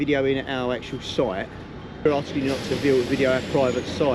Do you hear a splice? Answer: yes; 1 cut; at 2.0 s

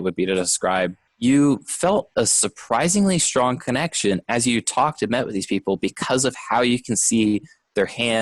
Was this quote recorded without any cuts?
no; 1 cut; at 1.0 s

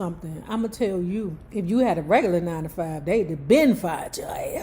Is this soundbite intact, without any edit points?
no; 1 cut; at 1.4 s

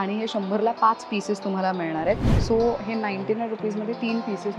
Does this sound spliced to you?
yes; 1 cut; at 2.3 s

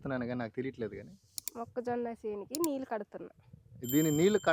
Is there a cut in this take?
no; 0 cuts

